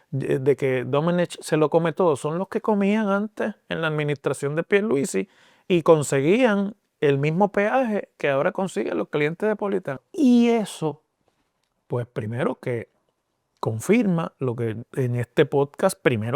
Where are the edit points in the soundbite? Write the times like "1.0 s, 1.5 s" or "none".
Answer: 10.0 s